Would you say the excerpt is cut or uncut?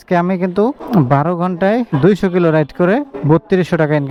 uncut